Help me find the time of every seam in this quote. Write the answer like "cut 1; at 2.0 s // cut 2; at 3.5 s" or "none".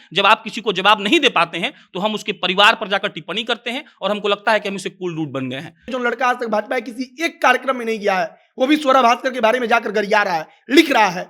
cut 1; at 5.8 s